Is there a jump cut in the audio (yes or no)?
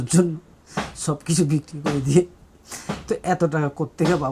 no